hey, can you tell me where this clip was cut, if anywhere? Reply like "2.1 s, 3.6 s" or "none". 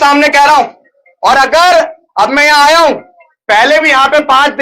none